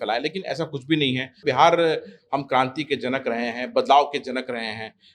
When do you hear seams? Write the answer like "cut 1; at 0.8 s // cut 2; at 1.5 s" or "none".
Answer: cut 1; at 1.3 s